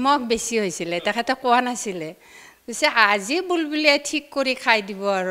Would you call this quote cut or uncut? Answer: uncut